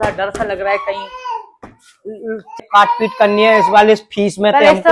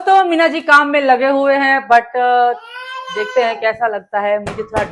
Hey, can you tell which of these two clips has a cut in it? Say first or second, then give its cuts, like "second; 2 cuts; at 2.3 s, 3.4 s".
first; 1 cut; at 2.5 s